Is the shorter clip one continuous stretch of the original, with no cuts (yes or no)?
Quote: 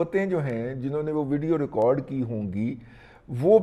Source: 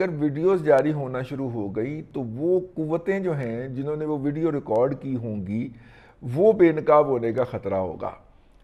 yes